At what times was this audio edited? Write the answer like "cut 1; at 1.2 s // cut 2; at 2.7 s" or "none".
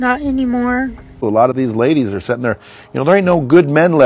cut 1; at 1.0 s